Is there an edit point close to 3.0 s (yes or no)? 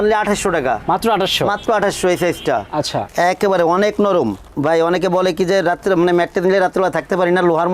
yes